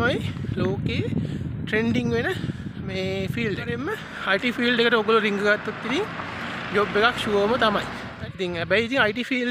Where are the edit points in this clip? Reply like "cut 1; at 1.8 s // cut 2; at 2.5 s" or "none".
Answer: cut 1; at 3.7 s // cut 2; at 8.1 s